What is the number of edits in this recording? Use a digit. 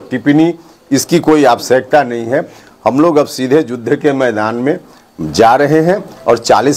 0